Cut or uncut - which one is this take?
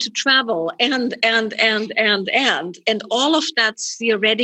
uncut